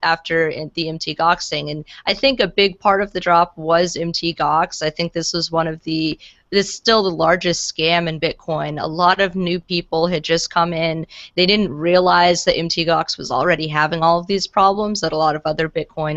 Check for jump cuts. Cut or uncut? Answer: uncut